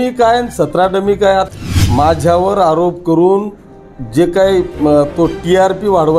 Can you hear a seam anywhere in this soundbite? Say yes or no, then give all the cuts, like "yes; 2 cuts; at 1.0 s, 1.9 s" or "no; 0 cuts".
yes; 1 cut; at 1.5 s